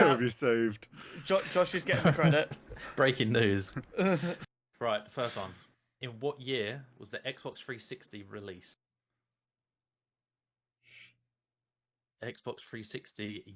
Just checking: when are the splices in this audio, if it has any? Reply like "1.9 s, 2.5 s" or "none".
4.4 s